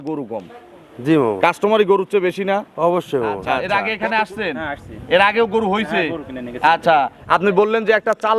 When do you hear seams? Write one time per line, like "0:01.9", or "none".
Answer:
0:03.6